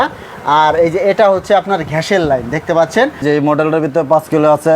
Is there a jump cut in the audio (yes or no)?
yes